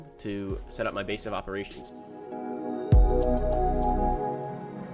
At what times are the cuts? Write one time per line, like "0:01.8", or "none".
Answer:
none